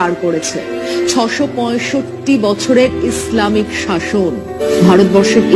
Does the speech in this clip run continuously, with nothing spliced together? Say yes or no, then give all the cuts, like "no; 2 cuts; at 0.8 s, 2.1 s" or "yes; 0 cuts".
no; 1 cut; at 4.5 s